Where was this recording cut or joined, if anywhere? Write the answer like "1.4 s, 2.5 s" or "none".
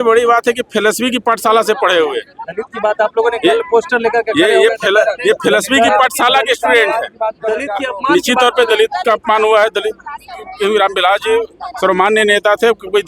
none